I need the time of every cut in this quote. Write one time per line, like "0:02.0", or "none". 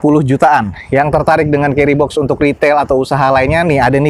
none